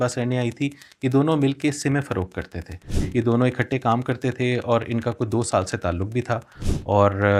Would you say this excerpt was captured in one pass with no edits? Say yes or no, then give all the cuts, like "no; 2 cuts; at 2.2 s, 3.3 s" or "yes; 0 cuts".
yes; 0 cuts